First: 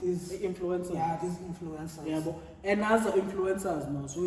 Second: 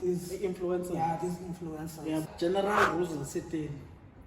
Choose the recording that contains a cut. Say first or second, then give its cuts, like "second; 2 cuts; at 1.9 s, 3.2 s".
second; 1 cut; at 2.3 s